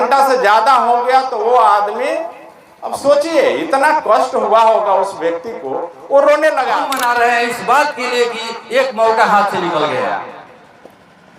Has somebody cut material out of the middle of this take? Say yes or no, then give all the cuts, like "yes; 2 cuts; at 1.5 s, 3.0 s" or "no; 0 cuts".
yes; 1 cut; at 6.9 s